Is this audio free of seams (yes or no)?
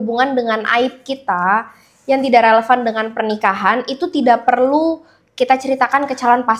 yes